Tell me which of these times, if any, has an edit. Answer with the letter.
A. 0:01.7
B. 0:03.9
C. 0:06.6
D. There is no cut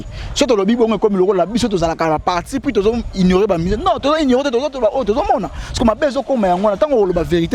D